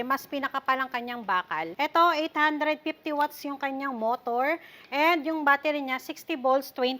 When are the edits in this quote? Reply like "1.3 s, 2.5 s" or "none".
1.7 s